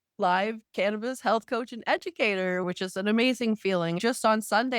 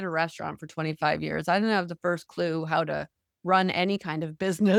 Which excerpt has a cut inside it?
first; 2 cuts; at 2.6 s, 4.0 s

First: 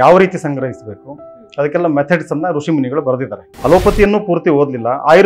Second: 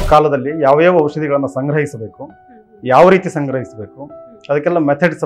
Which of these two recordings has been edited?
first; 1 cut; at 3.4 s

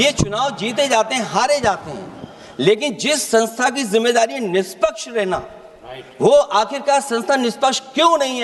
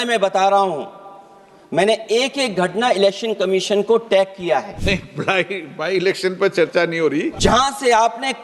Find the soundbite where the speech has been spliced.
second; 2 cuts; at 4.8 s, 7.3 s

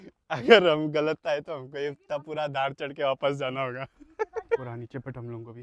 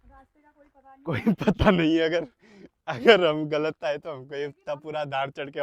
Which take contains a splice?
first; 1 cut; at 4.6 s

